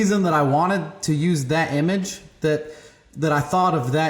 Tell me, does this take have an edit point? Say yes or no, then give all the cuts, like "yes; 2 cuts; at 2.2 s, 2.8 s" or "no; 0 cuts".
no; 0 cuts